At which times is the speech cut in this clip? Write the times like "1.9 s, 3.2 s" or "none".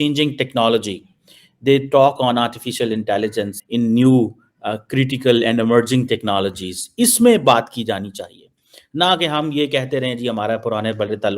3.5 s

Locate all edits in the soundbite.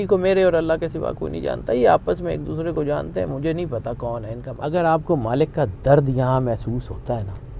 4.4 s

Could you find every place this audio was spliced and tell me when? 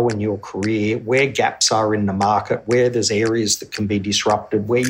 none

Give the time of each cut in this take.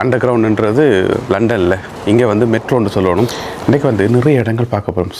3.5 s

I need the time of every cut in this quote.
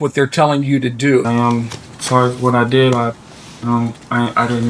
1.3 s

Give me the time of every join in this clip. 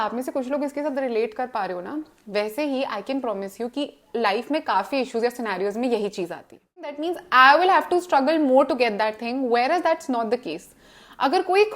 7.0 s

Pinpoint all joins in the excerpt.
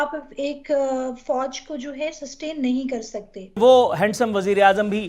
3.6 s

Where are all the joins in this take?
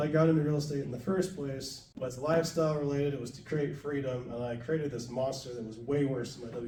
none

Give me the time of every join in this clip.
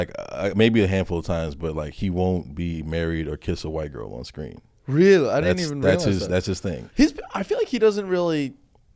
none

